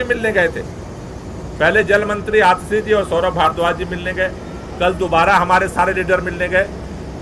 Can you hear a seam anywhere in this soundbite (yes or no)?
no